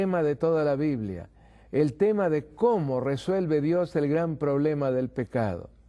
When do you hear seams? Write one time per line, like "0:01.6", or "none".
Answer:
none

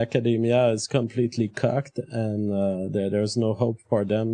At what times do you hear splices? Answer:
none

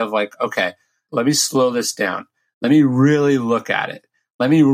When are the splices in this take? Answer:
0:01.0

